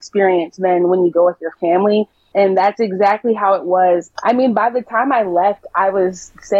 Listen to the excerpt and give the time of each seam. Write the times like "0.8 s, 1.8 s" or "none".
2.2 s, 4.1 s